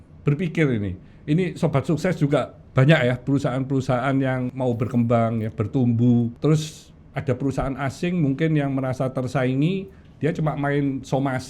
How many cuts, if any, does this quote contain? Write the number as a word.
two